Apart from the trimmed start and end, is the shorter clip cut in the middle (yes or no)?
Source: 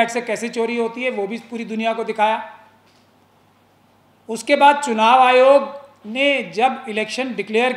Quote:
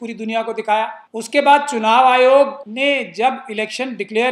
yes